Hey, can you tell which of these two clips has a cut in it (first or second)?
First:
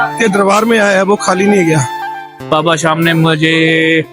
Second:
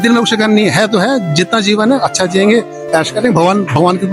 first